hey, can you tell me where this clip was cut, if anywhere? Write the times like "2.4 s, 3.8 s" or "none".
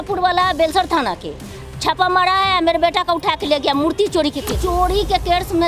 4.6 s